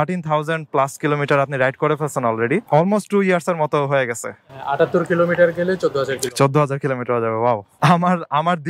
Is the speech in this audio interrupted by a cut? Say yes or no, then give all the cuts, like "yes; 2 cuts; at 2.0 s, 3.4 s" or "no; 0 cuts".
no; 0 cuts